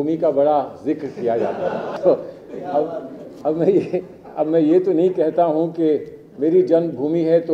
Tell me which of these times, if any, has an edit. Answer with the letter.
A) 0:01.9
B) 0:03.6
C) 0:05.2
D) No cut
A